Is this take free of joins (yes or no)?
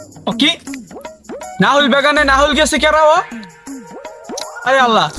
yes